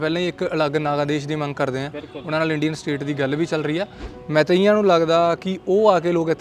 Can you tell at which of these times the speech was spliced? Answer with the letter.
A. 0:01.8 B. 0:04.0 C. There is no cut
B